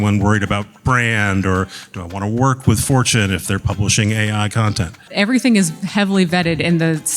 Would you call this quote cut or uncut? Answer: cut